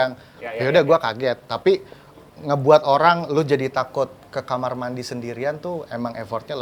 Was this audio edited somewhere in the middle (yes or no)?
no